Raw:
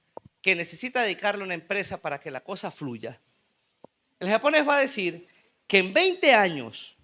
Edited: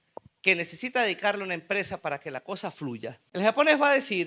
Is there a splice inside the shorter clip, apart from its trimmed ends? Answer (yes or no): yes